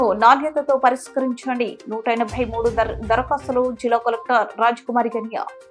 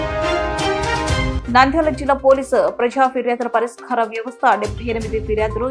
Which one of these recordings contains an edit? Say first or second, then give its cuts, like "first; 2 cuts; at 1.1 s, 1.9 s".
second; 1 cut; at 1.3 s